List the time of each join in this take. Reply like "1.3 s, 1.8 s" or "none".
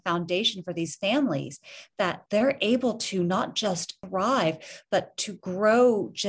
2.2 s, 3.9 s